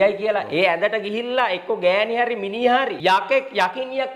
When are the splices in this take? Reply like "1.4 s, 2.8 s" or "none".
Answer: 2.9 s